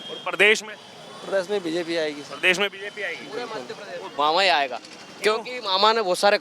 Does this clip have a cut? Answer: yes; 1 cut; at 4.1 s

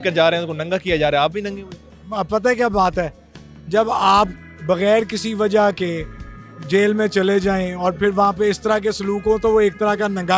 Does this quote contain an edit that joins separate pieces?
no; 0 cuts

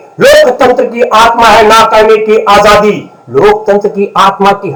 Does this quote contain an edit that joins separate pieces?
no; 0 cuts

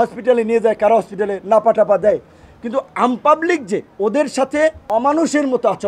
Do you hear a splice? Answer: yes; 2 cuts; at 3.9 s, 4.8 s

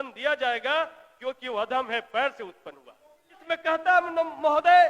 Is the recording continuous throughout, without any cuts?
no; 1 cut; at 3.3 s

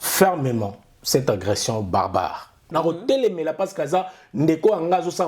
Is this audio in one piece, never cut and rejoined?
no; 1 cut; at 2.6 s

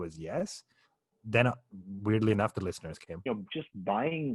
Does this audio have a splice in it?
yes; 1 cut; at 3.3 s

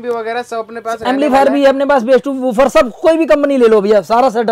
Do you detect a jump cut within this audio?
no; 0 cuts

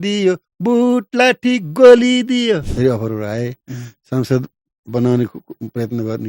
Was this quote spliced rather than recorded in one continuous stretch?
yes; 1 cut; at 2.7 s

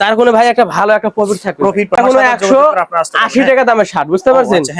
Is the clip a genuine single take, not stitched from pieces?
no; 1 cut; at 2.0 s

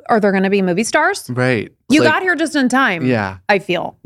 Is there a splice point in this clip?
yes; 1 cut; at 1.9 s

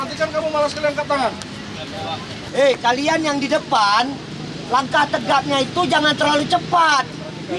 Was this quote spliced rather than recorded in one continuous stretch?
yes; 1 cut; at 2.4 s

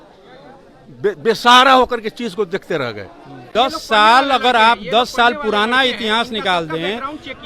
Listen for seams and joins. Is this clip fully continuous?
no; 1 cut; at 3.5 s

